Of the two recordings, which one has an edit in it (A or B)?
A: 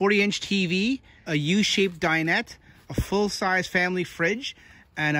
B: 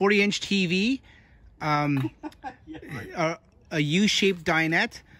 A